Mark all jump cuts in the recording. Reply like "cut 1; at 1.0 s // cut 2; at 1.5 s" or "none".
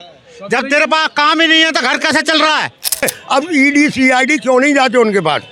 cut 1; at 3.2 s